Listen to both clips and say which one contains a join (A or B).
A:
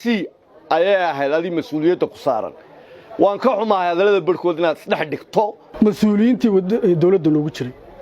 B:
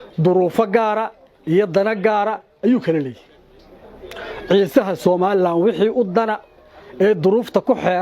A